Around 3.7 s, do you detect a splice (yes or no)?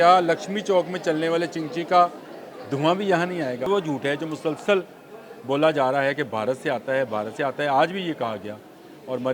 yes